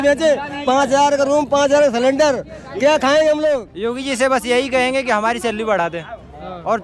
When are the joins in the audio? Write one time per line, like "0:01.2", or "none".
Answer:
0:03.7